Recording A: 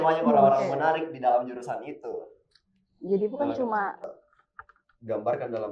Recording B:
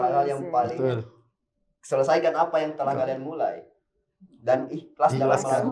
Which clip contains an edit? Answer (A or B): A